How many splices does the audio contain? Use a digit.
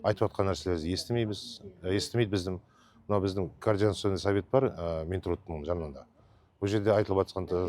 0